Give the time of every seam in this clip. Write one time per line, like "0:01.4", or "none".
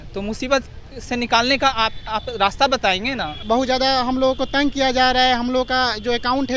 0:03.3